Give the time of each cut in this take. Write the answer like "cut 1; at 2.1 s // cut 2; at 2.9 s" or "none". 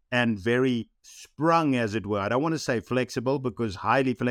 cut 1; at 1.0 s